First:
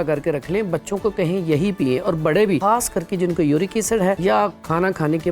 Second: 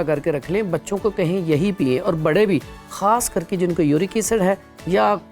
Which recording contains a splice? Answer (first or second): first